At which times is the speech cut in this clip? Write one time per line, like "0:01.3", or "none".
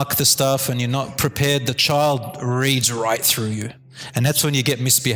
none